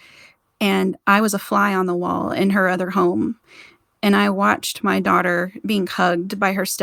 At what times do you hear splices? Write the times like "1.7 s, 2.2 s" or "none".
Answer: none